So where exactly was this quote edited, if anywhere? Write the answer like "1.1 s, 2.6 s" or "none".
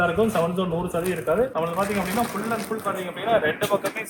none